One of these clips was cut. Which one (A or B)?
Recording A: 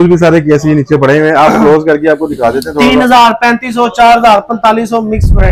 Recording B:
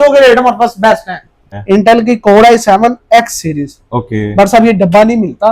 B